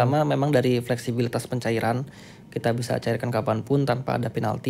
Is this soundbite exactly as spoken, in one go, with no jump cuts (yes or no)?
yes